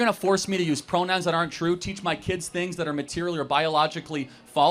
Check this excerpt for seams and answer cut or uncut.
uncut